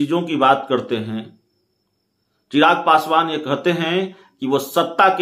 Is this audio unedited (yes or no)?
yes